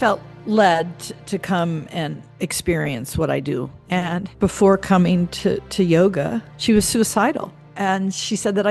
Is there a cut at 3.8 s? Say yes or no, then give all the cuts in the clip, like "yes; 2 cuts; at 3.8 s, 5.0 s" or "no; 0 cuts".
yes; 4 cuts; at 2.2 s, 3.8 s, 6.5 s, 7.6 s